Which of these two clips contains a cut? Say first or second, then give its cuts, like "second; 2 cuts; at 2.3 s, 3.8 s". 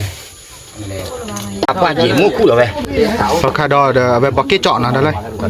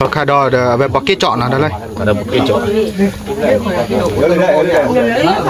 first; 1 cut; at 1.7 s